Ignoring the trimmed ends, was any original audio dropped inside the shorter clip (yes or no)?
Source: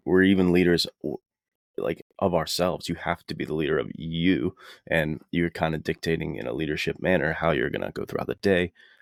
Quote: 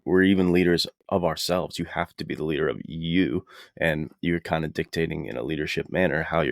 yes